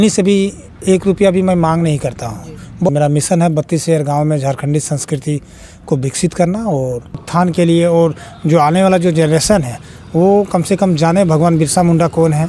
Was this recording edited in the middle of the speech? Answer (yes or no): yes